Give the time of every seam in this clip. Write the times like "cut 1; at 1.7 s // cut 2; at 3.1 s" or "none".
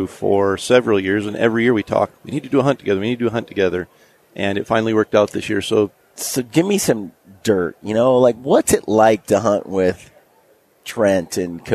none